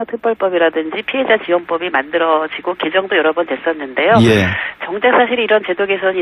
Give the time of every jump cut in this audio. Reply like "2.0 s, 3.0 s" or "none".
none